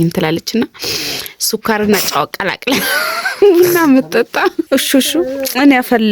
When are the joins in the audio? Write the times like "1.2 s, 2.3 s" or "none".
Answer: 4.6 s